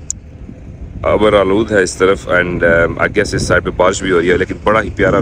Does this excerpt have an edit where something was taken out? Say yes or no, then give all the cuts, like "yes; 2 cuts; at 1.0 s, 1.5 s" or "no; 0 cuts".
no; 0 cuts